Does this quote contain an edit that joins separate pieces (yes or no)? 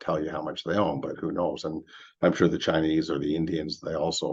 no